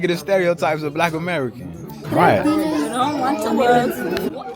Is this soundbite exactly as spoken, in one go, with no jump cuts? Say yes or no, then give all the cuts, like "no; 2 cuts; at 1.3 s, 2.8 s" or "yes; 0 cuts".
no; 1 cut; at 2.0 s